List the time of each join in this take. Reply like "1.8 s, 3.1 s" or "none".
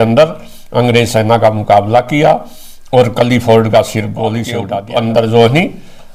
4.5 s